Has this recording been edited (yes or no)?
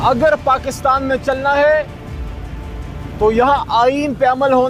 no